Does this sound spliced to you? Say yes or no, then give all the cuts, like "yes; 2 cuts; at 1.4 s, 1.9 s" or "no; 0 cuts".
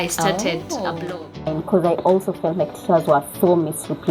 yes; 1 cut; at 1.5 s